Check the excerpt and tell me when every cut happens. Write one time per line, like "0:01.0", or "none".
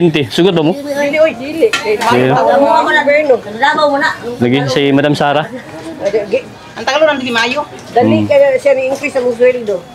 none